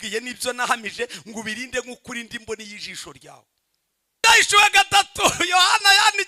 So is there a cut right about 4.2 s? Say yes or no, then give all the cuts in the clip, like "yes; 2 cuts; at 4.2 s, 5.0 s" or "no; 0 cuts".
yes; 1 cut; at 4.2 s